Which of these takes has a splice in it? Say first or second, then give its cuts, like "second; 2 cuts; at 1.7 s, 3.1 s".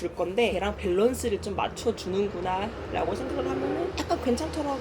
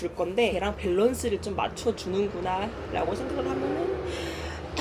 first; 1 cut; at 3.9 s